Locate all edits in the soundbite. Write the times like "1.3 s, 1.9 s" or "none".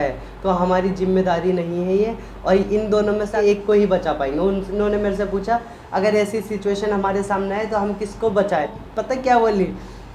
3.3 s, 8.7 s